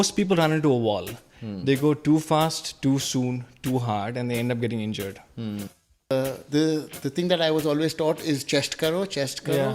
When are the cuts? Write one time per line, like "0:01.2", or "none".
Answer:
0:05.9